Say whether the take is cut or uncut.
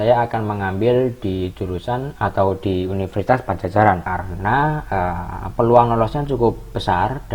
cut